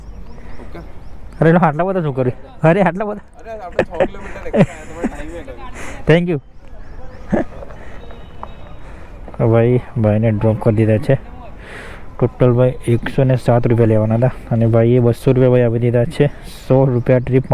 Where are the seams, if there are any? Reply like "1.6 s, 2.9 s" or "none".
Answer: none